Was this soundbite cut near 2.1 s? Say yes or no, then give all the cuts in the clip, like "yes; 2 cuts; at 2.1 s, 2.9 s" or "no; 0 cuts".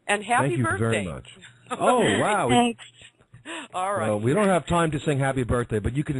yes; 1 cut; at 2.1 s